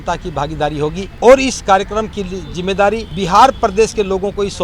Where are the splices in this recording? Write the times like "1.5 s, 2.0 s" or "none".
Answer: 1.1 s, 3.1 s